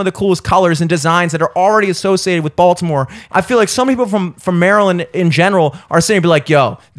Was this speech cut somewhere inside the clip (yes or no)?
yes